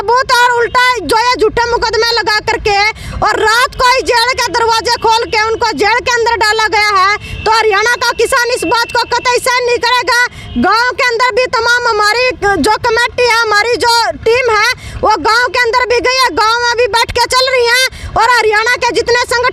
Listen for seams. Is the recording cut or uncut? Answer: uncut